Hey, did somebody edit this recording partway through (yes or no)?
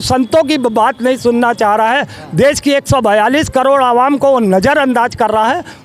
no